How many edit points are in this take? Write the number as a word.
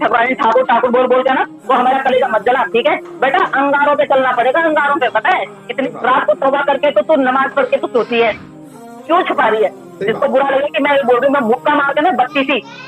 three